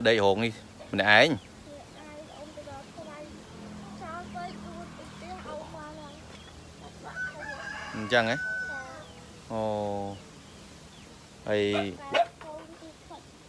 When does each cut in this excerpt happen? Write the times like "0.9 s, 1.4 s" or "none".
none